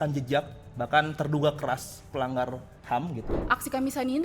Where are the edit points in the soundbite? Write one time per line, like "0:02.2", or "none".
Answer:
0:03.3